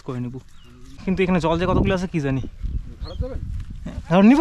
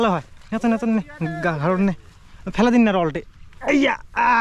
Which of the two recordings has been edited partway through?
first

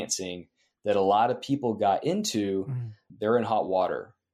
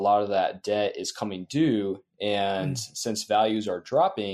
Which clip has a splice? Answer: first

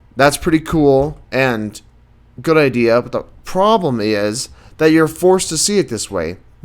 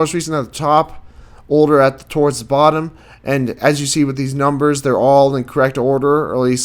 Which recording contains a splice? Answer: first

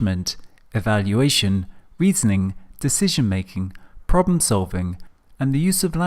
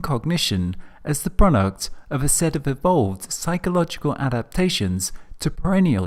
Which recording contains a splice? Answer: first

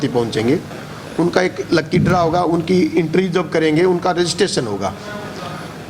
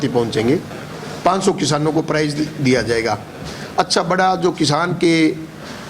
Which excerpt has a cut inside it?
second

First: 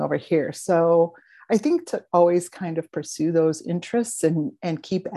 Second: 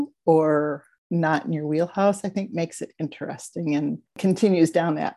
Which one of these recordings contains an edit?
second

